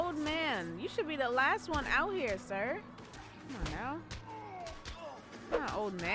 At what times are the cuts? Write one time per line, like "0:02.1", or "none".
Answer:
0:03.1